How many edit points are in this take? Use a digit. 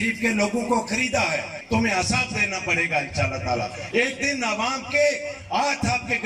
1